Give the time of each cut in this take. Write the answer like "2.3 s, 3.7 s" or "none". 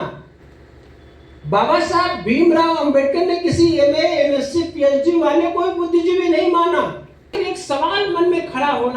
7.4 s